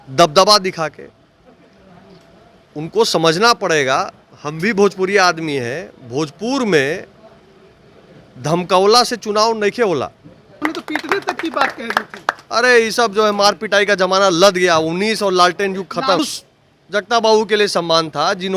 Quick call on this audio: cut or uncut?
cut